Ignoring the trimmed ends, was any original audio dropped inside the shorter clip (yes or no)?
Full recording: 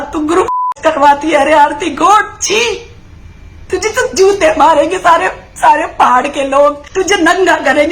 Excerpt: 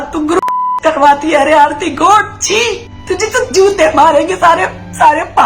yes